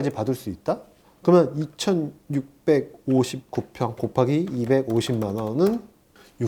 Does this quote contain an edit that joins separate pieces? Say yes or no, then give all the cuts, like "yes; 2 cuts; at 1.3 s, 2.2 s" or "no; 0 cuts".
no; 0 cuts